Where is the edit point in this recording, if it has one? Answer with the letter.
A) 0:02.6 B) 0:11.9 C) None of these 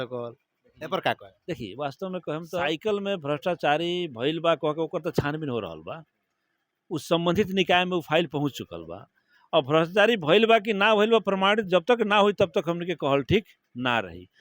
A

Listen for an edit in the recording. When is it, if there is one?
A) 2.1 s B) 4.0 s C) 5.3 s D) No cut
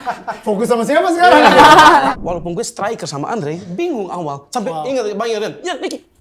A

